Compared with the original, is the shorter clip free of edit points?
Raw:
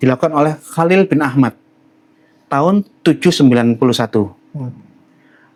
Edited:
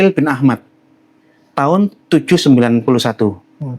yes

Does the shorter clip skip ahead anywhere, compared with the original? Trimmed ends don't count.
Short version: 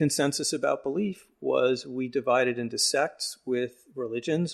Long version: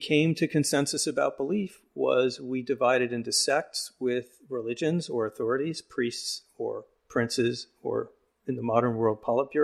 no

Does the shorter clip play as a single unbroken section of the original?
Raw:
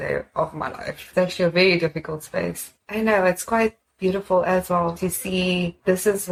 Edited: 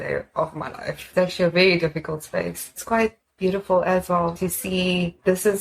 no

